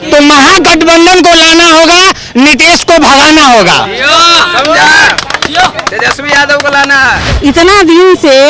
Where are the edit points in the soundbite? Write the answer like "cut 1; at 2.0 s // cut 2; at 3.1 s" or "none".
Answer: cut 1; at 7.3 s

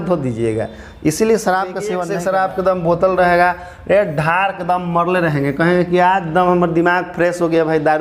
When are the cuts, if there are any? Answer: cut 1; at 2.1 s

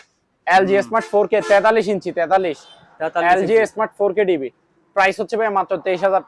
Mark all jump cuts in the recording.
none

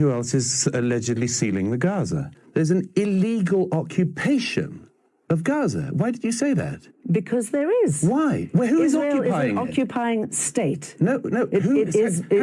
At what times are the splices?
cut 1; at 2.4 s

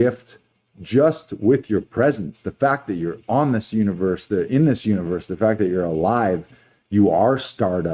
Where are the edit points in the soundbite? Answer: none

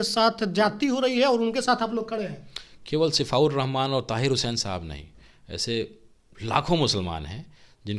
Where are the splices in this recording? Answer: none

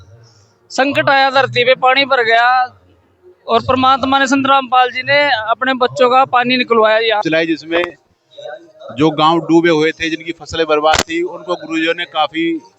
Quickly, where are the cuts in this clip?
cut 1; at 7.2 s

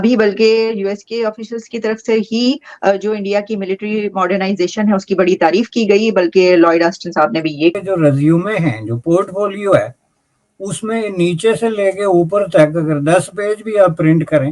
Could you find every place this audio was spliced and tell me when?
cut 1; at 7.7 s

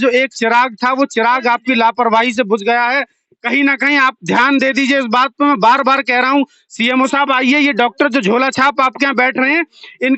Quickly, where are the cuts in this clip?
none

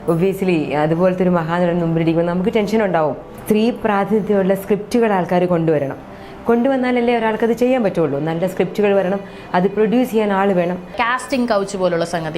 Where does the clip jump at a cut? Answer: cut 1; at 3.3 s // cut 2; at 11.0 s

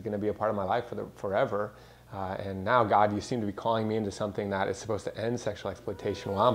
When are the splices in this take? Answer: none

